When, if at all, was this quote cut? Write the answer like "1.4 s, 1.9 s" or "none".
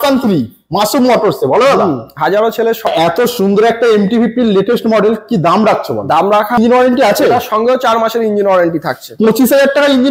2.9 s, 6.6 s